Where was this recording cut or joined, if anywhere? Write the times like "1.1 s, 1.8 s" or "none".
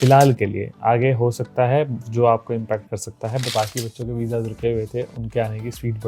3.5 s